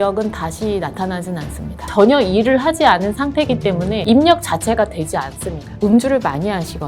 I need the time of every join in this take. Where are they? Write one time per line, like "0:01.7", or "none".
0:01.9
0:05.8